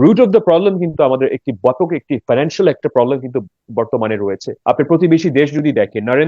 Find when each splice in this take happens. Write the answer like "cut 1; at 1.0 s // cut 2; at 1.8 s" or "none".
cut 1; at 4.5 s